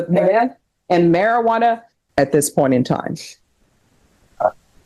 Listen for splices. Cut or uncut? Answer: cut